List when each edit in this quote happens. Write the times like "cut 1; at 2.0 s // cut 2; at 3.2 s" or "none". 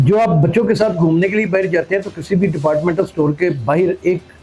none